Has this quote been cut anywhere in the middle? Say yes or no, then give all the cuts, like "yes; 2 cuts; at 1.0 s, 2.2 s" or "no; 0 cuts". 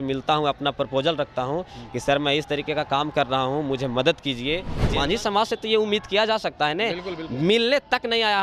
yes; 1 cut; at 4.8 s